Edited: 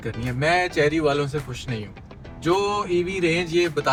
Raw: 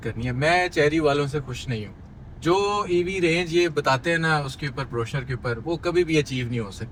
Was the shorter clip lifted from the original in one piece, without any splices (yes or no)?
yes